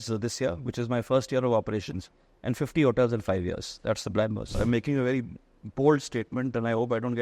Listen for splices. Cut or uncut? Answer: cut